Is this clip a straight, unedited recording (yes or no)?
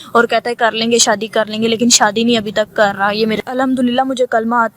no